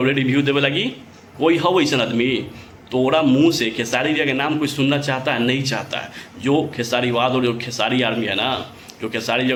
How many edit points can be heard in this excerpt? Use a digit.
0